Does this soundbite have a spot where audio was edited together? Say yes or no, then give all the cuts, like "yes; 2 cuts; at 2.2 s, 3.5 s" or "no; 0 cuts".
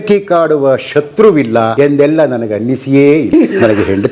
yes; 1 cut; at 1.7 s